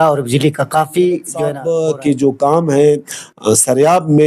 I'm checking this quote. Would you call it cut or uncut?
cut